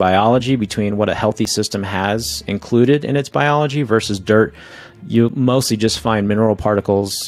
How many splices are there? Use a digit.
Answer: 0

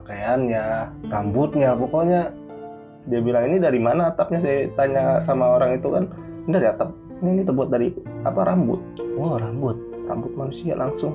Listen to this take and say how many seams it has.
2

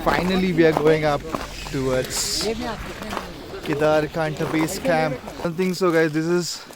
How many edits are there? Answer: 1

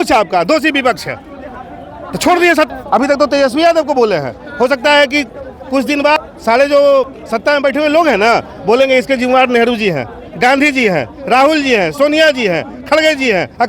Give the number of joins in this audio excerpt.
3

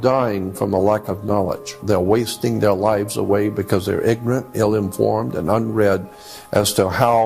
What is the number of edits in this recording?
1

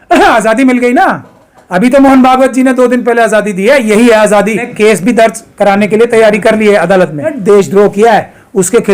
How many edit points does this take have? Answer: 2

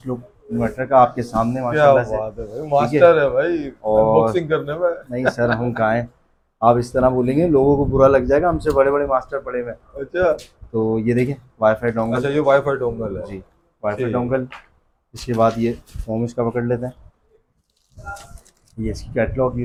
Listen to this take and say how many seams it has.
0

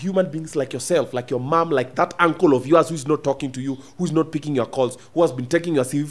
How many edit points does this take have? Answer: 0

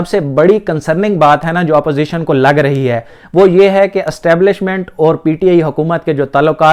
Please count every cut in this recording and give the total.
0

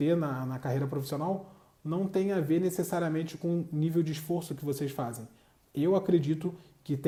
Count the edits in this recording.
0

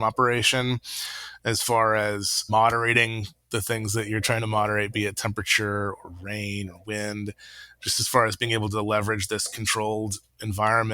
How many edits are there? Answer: 1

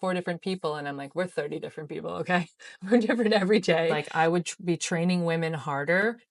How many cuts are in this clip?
1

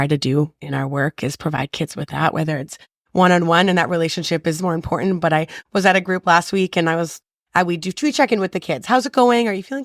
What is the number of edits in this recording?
0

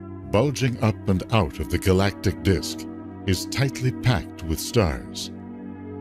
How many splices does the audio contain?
1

